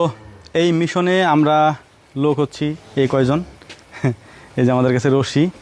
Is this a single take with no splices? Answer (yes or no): yes